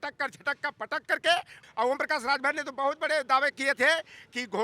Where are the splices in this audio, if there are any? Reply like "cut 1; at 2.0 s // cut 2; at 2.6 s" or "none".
cut 1; at 1.6 s